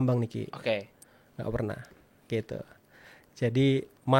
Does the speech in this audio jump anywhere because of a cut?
no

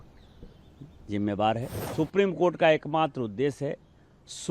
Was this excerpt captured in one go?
no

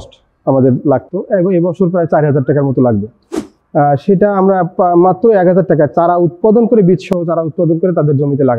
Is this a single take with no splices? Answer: yes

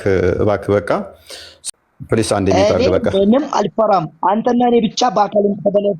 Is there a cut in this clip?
yes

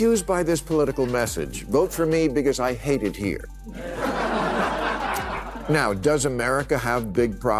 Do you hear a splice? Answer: no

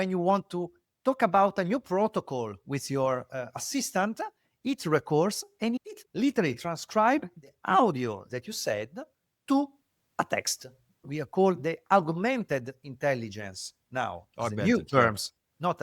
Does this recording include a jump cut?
yes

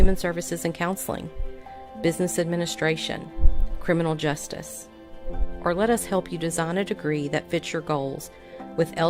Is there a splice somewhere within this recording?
no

